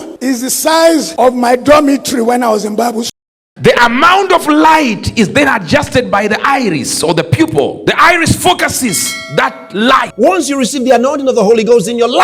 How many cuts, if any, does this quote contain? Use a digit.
2